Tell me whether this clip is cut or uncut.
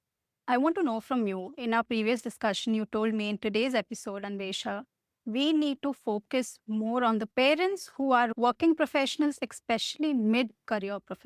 uncut